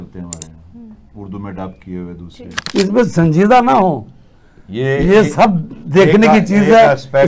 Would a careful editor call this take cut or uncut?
cut